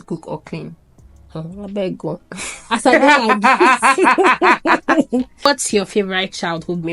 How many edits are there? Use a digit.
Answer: 1